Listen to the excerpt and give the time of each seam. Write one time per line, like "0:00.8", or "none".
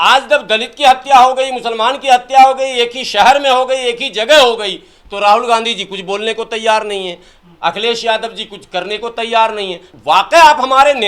0:09.9